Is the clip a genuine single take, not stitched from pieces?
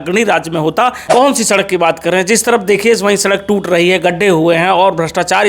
no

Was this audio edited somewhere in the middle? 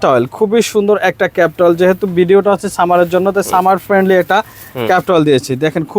no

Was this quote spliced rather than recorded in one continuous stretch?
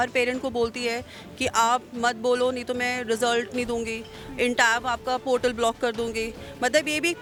no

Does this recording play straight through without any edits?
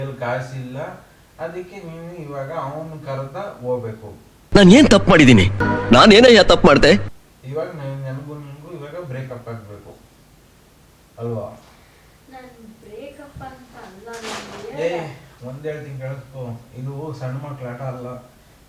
yes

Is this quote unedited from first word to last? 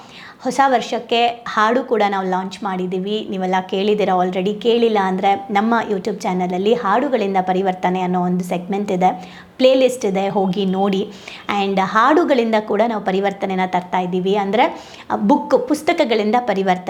yes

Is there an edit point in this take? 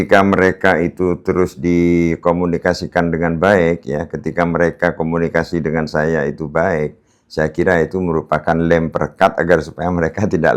no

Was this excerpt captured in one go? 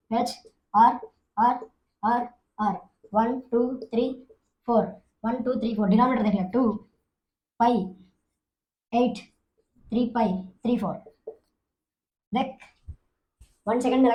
yes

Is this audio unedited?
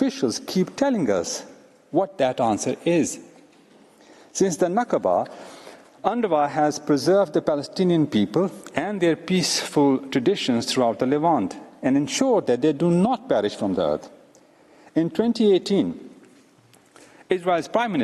yes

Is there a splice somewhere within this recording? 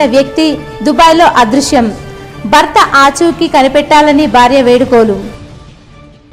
no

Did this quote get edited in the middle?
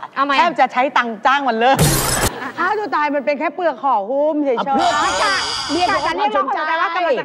yes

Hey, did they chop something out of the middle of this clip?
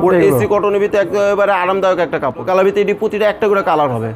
yes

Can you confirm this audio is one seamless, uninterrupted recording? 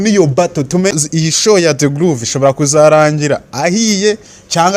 no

